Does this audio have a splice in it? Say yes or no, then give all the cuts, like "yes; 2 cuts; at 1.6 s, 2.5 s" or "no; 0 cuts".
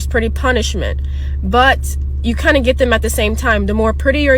no; 0 cuts